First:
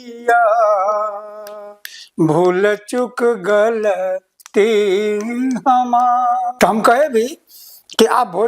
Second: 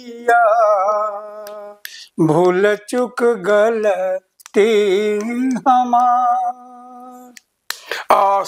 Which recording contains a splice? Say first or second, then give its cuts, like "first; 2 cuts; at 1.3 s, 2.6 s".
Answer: first; 1 cut; at 6.5 s